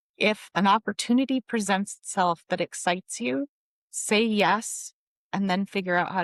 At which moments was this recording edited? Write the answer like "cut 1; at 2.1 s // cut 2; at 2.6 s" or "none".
none